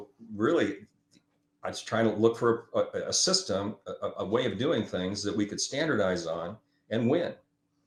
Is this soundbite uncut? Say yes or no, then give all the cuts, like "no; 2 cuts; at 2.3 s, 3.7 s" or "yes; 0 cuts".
yes; 0 cuts